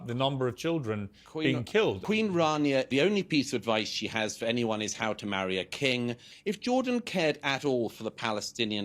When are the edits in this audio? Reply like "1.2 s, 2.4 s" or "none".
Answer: 2.0 s, 2.9 s, 6.3 s

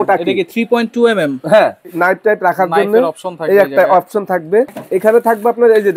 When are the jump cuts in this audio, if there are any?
1.8 s, 4.8 s

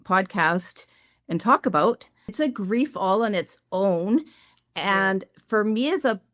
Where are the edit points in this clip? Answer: 2.3 s

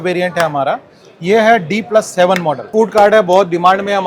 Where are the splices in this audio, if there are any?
2.7 s

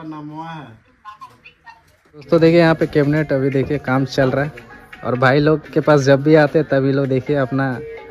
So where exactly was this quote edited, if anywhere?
2.3 s

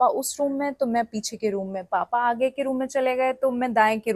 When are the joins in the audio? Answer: none

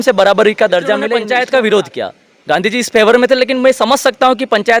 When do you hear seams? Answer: 1.2 s

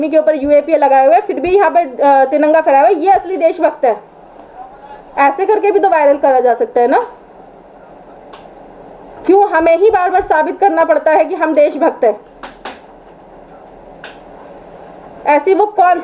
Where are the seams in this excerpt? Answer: none

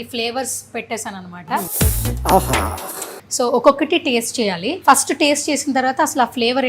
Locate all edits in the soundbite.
1.7 s, 3.2 s, 4.7 s

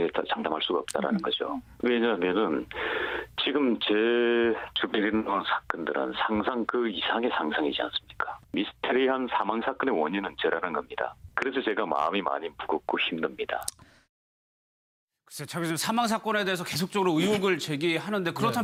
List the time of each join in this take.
none

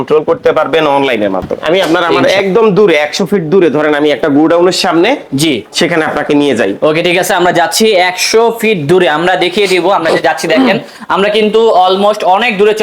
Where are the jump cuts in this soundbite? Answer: 1.8 s

